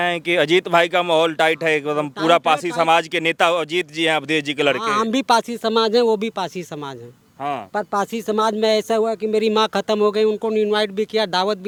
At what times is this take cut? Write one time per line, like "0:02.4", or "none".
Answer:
none